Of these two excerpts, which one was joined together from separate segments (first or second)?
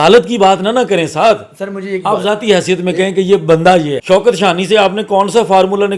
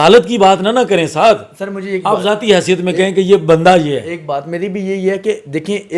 first